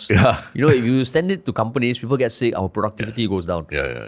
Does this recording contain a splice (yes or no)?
no